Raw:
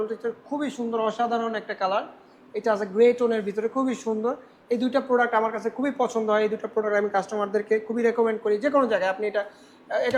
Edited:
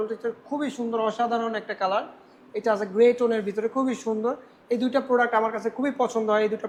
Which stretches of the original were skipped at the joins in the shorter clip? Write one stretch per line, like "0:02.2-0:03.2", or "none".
none